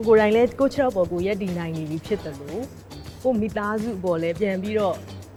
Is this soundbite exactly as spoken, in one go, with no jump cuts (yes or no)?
yes